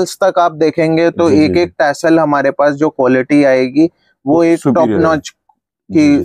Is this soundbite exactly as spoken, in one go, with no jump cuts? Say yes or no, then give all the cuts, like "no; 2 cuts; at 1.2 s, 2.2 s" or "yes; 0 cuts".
yes; 0 cuts